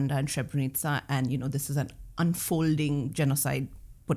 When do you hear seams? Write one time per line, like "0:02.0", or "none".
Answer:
none